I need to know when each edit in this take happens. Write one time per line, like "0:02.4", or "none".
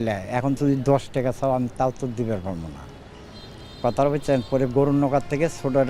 none